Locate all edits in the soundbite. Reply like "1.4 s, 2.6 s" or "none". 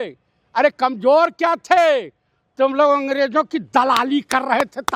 none